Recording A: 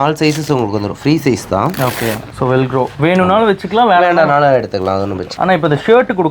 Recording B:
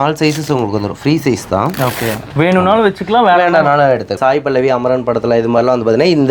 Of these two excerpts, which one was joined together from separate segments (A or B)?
B